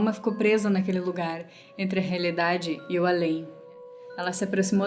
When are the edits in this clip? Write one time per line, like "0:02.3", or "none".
0:03.8